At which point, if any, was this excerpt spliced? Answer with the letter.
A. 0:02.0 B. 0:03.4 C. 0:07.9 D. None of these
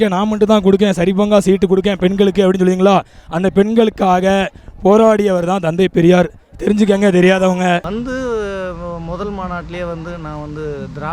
C